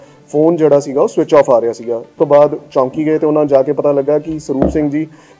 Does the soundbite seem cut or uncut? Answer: cut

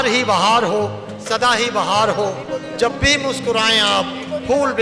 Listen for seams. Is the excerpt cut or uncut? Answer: uncut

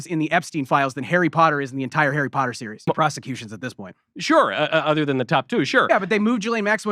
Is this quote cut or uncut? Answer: cut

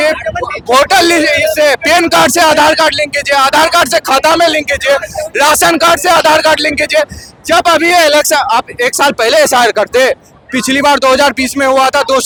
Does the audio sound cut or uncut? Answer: uncut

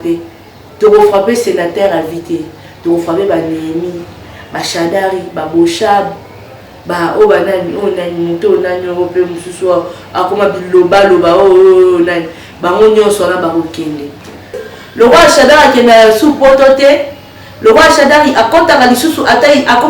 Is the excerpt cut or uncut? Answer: cut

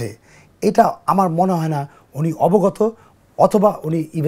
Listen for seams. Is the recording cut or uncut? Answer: uncut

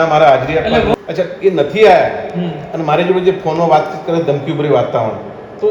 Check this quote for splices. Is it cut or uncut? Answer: cut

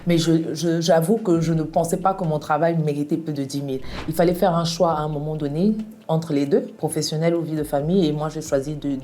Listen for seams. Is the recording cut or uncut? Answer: cut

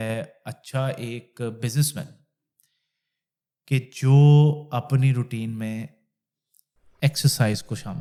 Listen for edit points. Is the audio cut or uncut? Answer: uncut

